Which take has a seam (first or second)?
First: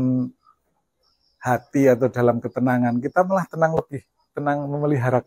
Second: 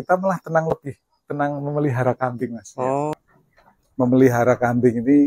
second